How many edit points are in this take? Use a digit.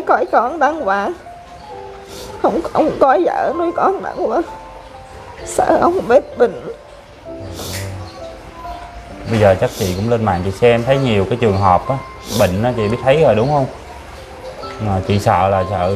0